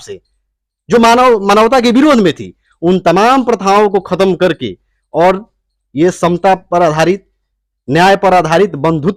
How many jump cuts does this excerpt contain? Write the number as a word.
zero